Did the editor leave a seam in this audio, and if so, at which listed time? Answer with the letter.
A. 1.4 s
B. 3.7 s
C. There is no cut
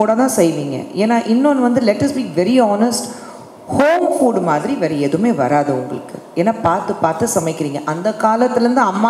C